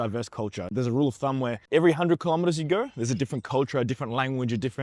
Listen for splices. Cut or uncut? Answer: uncut